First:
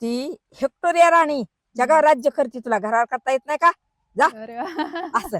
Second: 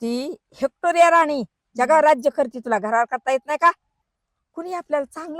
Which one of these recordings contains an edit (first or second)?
second